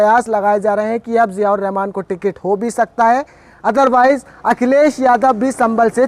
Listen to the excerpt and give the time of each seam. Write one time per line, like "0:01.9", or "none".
none